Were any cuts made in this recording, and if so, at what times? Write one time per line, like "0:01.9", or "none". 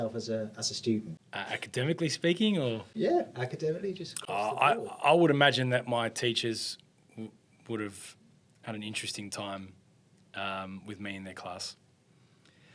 none